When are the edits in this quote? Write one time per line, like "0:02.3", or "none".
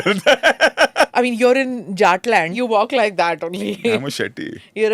0:01.1
0:02.5